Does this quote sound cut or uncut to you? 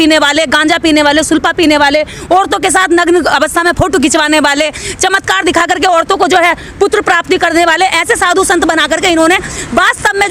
uncut